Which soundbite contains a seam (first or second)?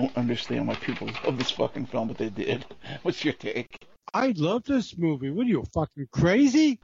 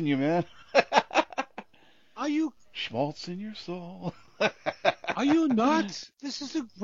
second